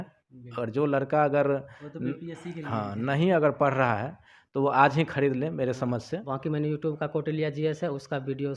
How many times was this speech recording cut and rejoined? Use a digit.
1